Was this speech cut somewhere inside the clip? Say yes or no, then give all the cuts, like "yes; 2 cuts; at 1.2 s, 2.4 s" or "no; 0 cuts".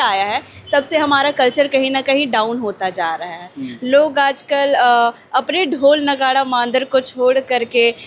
no; 0 cuts